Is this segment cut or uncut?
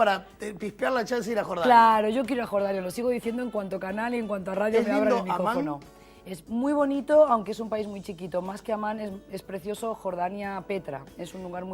cut